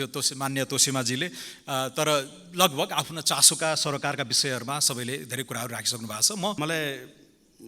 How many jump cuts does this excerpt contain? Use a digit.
1